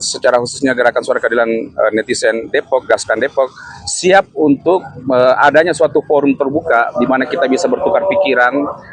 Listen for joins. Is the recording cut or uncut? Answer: uncut